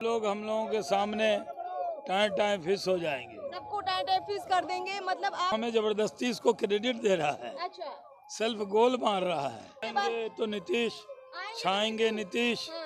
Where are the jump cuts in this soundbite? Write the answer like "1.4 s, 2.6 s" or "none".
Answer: 5.5 s, 9.9 s